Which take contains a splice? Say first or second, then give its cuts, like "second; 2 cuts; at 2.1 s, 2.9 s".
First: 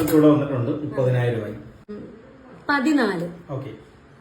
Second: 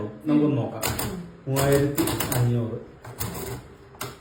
first; 1 cut; at 1.9 s